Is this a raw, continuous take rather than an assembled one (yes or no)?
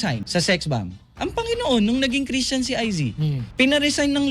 no